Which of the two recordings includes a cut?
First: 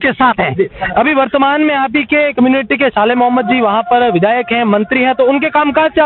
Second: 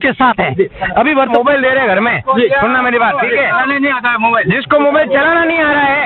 second; 1 cut; at 1.3 s

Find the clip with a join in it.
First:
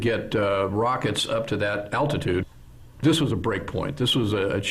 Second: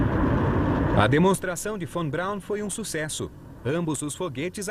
second; 1 cut; at 1.1 s

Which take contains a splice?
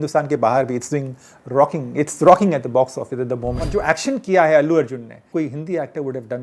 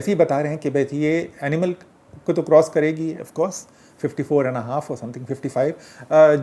first; 2 cuts; at 3.6 s, 5.1 s

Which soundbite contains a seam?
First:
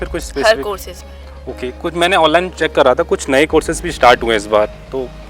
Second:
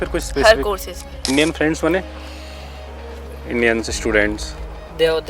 second; 1 cut; at 1.2 s

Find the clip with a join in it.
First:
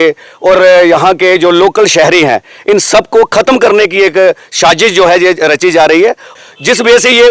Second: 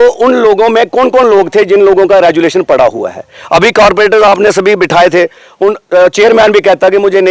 first; 1 cut; at 6.3 s

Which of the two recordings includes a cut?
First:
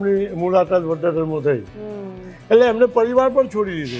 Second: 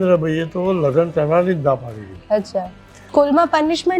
second; 1 cut; at 3.1 s

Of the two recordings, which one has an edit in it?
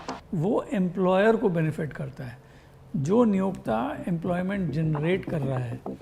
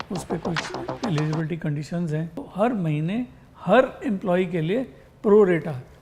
second; 1 cut; at 2.5 s

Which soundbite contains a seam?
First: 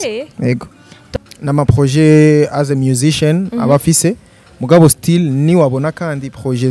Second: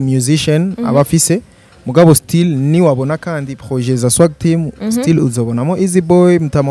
first; 1 cut; at 1.0 s

